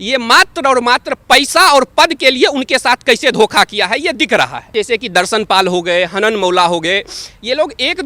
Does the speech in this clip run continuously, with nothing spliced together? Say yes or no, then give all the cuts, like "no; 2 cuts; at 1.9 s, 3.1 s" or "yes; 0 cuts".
no; 1 cut; at 4.6 s